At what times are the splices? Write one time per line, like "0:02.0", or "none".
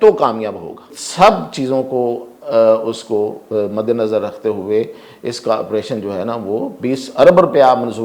0:01.0